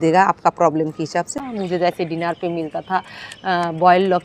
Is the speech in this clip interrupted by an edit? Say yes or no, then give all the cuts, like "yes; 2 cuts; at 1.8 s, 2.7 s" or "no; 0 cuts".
yes; 1 cut; at 1.4 s